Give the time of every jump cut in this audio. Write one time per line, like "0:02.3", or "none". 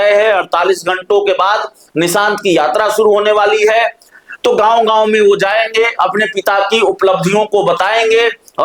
none